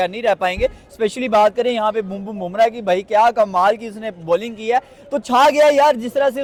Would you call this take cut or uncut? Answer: uncut